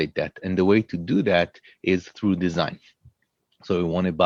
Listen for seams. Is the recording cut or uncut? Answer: uncut